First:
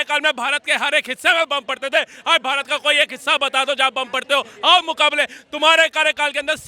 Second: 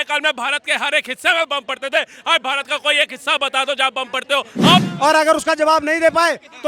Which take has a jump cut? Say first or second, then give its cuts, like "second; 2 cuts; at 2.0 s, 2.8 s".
second; 1 cut; at 4.9 s